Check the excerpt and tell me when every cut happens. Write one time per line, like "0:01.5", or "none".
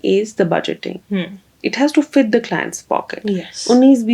none